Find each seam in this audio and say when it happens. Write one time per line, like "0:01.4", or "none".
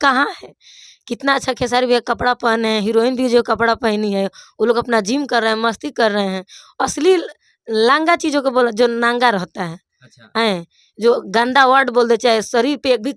none